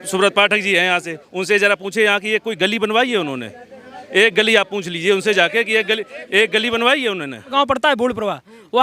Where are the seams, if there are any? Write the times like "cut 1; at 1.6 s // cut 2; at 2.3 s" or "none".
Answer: cut 1; at 7.5 s